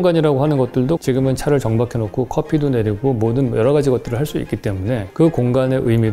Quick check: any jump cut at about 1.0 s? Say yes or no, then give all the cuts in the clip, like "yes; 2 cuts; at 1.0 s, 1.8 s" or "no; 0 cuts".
yes; 1 cut; at 1.0 s